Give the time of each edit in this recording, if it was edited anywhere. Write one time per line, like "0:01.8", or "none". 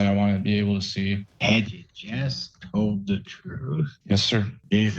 0:01.3
0:03.9

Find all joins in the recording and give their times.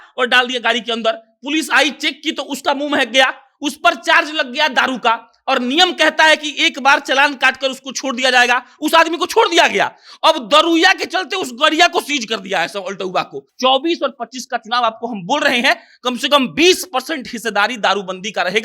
0:13.5

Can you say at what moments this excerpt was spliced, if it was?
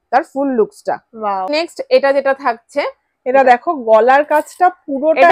0:01.5

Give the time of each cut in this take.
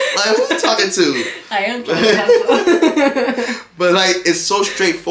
none

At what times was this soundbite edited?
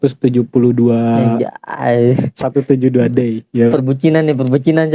none

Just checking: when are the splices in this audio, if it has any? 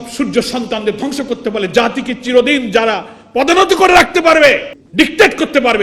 0:04.8

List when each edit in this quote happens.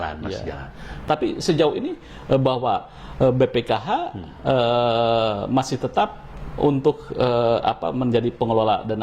0:01.0

